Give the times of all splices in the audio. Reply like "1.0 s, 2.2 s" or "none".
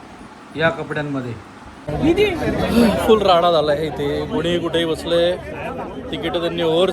1.8 s